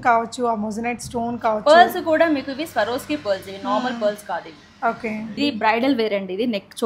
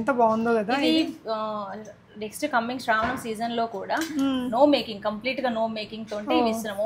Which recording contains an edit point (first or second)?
first